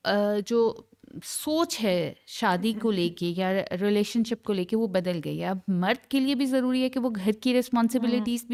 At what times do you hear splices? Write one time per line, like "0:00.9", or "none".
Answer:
none

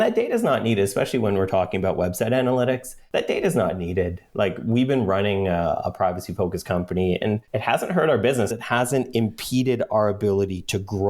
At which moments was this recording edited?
0:02.9
0:07.2
0:08.5

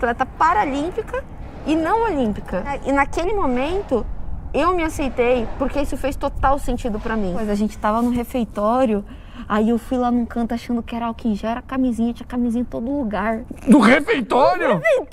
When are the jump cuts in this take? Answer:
0:02.8
0:07.4

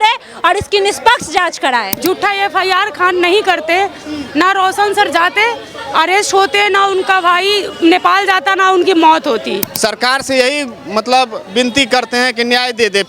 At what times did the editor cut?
0:01.9
0:09.7

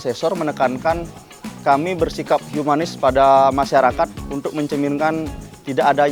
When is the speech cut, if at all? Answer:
0:04.2

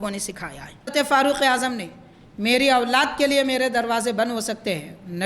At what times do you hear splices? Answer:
0:00.9

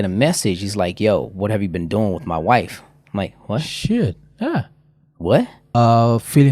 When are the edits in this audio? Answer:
0:05.6

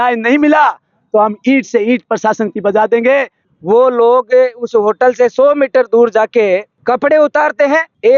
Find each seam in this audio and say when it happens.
0:03.4
0:06.7

